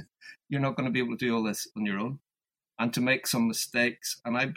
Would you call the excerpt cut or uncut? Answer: uncut